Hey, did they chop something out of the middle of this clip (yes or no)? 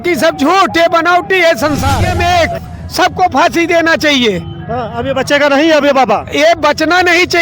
yes